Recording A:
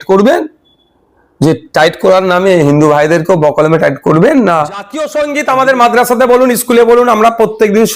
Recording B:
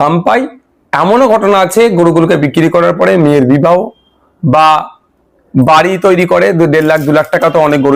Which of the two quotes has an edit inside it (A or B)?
A